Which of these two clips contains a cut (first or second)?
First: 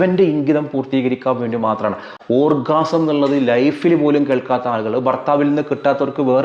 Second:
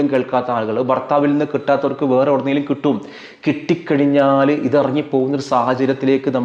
first